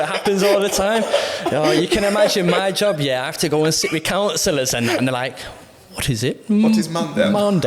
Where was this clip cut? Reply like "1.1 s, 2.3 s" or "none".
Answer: none